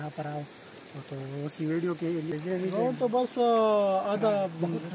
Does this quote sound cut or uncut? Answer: cut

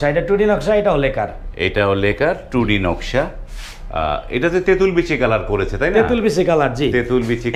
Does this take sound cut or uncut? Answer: uncut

